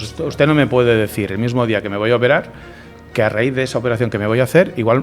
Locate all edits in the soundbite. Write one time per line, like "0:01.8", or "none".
none